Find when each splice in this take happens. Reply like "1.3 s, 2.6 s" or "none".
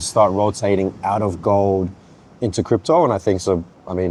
none